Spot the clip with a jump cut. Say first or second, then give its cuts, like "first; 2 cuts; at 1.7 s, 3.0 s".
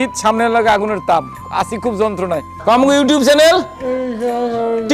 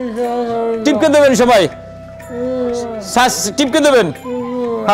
first; 1 cut; at 2.5 s